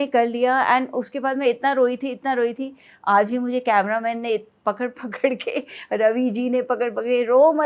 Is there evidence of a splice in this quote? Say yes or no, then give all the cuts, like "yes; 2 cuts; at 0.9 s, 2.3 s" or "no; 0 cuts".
no; 0 cuts